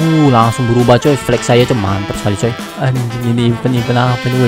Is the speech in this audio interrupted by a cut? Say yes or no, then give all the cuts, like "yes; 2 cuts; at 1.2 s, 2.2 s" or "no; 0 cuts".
yes; 1 cut; at 2.7 s